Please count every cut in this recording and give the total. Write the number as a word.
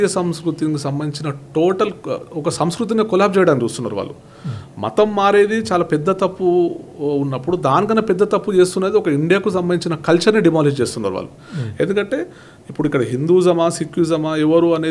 zero